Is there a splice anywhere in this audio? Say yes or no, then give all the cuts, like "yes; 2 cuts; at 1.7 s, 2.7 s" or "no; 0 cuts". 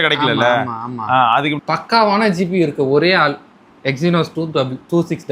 yes; 1 cut; at 1.6 s